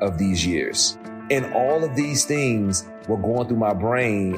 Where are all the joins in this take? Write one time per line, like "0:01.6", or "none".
0:01.1